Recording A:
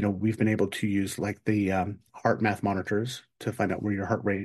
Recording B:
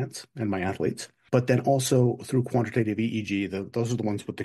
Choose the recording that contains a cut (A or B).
B